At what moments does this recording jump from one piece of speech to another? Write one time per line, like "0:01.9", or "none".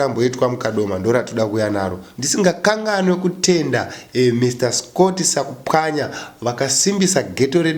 0:02.1